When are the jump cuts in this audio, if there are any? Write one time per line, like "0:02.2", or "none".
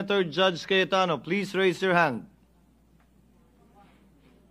none